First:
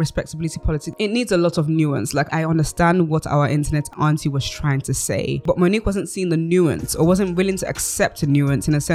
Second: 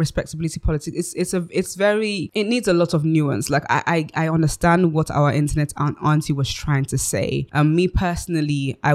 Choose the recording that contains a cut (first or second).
first